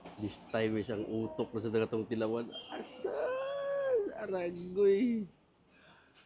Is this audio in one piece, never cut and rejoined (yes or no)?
yes